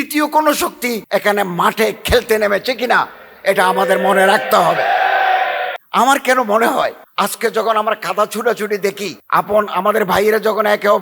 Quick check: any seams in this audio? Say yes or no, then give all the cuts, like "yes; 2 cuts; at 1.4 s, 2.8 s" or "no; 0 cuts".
yes; 4 cuts; at 1.0 s, 5.8 s, 7.0 s, 9.1 s